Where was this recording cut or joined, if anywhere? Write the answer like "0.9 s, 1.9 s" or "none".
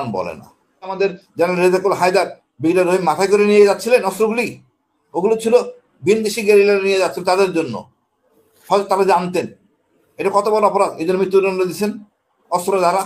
0.9 s